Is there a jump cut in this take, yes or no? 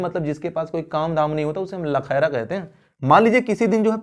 yes